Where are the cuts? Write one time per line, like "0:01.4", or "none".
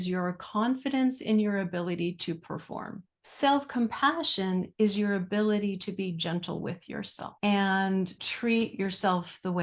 0:03.2
0:07.2
0:08.2